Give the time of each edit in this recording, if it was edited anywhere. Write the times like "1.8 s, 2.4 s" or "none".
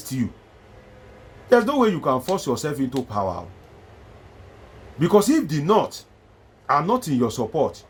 none